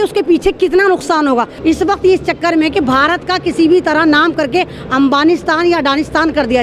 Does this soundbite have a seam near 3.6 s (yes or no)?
no